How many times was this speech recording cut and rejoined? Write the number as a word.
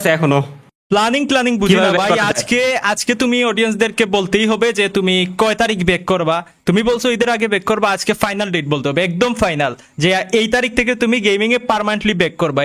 zero